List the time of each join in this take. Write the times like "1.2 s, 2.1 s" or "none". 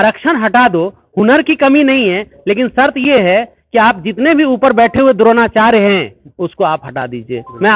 none